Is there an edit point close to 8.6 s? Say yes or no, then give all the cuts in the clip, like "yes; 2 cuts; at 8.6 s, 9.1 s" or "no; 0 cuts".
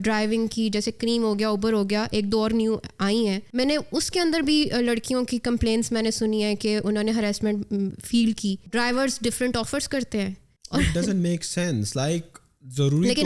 yes; 3 cuts; at 3.4 s, 8.6 s, 10.5 s